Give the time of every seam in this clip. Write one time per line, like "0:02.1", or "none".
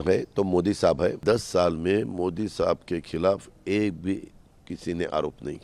0:01.2